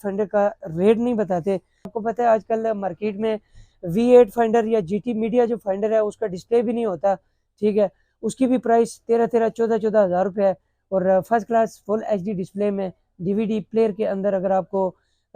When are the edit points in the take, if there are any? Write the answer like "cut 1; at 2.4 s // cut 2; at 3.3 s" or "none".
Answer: cut 1; at 2.0 s